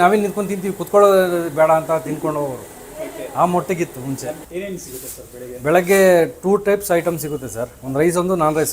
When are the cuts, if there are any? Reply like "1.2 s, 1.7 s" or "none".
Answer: 4.4 s